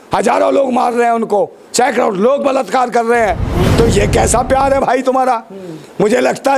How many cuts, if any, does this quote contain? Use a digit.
1